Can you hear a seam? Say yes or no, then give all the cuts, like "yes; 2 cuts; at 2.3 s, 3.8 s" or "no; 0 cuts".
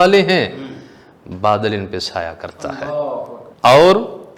yes; 1 cut; at 3.4 s